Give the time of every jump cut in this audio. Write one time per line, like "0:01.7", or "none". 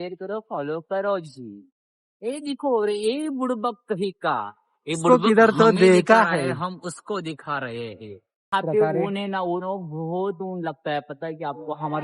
0:08.5